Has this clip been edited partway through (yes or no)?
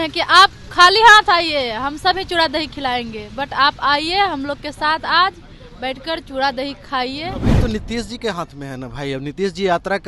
yes